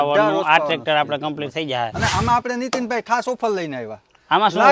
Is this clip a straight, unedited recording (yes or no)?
no